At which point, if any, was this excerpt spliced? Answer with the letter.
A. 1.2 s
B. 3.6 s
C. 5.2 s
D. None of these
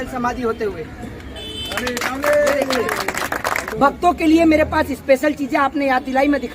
B